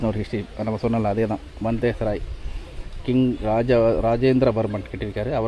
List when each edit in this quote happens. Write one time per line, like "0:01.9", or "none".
none

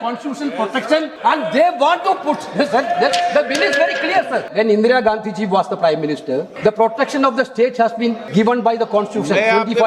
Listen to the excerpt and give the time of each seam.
0:01.1
0:04.5
0:06.5
0:08.2

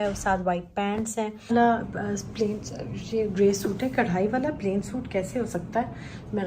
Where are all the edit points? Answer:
0:01.5

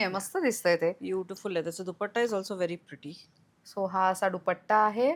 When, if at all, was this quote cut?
none

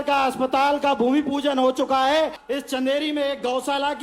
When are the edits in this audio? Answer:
0:02.4

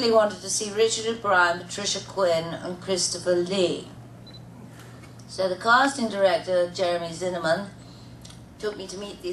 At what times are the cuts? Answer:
0:08.4

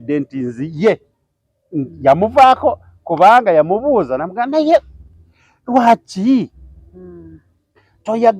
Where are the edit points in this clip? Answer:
none

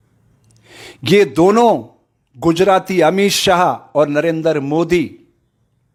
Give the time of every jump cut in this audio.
none

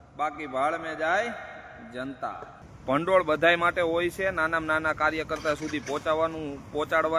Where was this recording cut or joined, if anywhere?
0:02.6

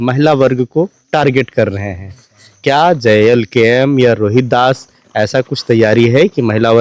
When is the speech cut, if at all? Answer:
none

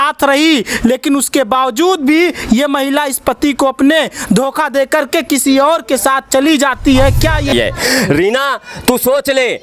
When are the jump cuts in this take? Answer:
0:07.5

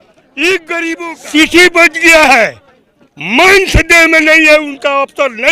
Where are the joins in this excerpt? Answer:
0:01.0

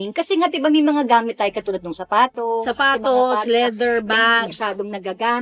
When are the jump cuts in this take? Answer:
none

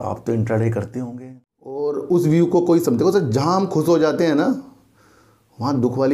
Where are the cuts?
0:01.8

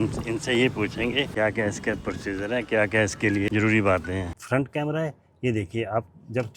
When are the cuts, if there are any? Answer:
0:01.3
0:03.5
0:04.4

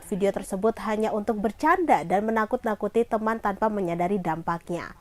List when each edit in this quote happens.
none

